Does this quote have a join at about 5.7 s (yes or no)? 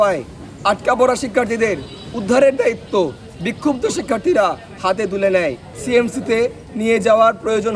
yes